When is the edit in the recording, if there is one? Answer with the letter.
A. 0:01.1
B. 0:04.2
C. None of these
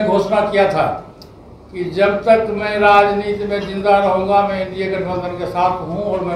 C